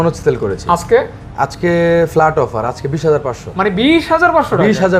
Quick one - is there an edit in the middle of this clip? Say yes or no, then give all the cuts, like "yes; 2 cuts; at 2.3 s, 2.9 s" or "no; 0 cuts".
no; 0 cuts